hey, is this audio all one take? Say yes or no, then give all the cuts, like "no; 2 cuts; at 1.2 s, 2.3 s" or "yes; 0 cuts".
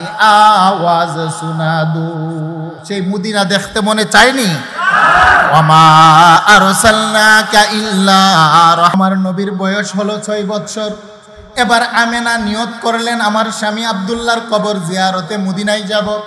no; 1 cut; at 9.0 s